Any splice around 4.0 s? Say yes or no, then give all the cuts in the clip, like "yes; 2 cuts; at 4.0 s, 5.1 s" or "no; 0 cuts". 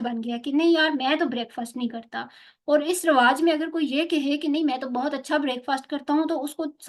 no; 0 cuts